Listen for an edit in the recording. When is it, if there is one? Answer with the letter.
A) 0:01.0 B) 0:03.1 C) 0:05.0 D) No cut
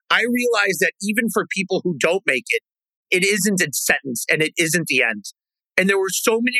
B